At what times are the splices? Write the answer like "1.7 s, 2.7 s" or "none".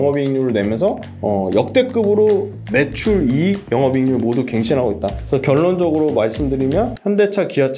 1.1 s, 2.6 s, 3.6 s, 5.2 s, 7.0 s